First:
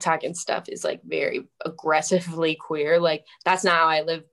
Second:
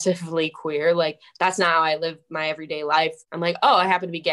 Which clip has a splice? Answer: second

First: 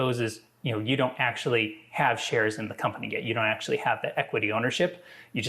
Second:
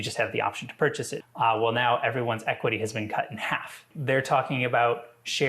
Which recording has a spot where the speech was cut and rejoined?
second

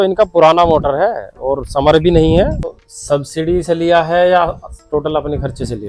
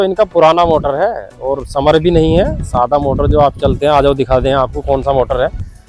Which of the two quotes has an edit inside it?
first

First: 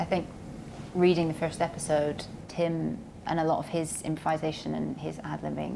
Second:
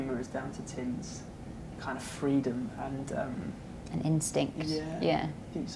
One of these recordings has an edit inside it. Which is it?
first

